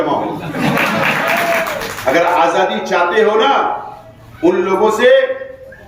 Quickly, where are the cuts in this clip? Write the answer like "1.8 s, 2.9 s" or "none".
1.9 s